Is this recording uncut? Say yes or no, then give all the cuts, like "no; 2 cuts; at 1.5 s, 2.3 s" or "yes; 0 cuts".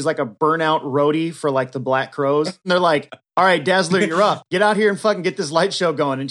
no; 1 cut; at 2.6 s